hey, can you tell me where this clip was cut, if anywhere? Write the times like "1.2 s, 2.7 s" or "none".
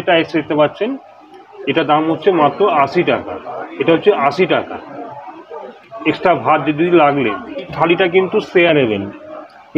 7.7 s